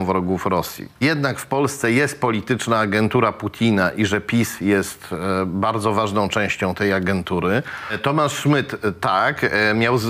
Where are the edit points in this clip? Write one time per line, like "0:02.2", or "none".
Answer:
0:01.0
0:07.9

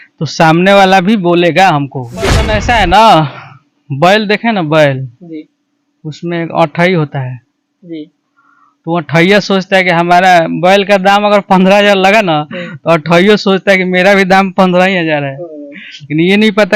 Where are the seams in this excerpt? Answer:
0:02.5

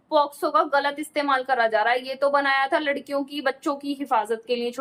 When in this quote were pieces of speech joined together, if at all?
none

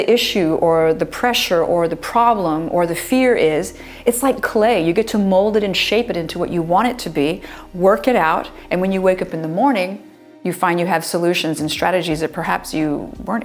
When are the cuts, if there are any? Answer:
none

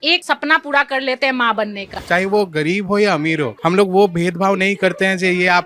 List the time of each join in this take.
0:02.0

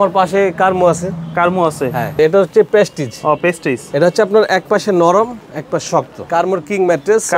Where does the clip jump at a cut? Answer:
0:02.2
0:06.2

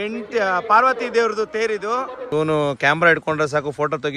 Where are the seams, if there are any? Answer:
0:02.3

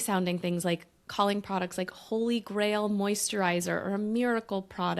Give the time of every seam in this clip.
none

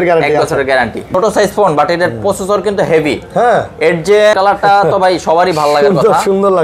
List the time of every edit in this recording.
0:01.1
0:04.3

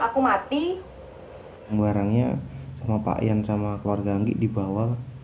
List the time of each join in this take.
0:01.7

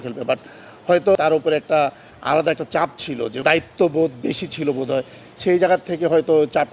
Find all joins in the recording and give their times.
0:01.2
0:03.3

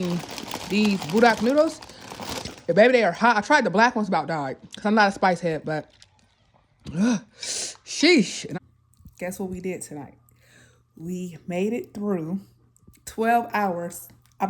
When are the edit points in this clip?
0:08.4

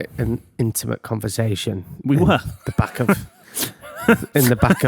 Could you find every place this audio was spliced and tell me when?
none

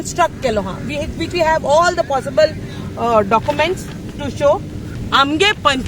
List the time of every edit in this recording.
0:04.9

